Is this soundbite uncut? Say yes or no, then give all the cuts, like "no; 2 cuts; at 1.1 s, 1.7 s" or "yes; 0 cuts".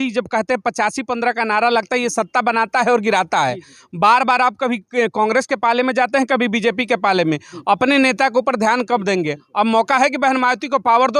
yes; 0 cuts